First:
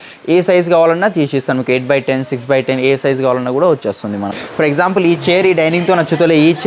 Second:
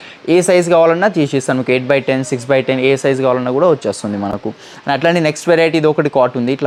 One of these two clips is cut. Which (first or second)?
first